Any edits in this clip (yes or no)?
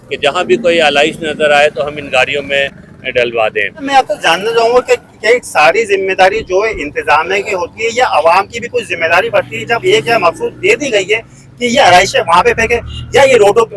yes